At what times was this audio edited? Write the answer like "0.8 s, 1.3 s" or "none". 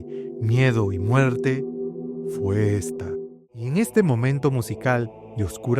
3.3 s